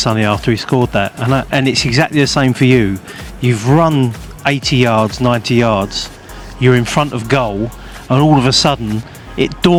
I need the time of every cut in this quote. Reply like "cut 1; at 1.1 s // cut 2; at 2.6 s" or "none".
none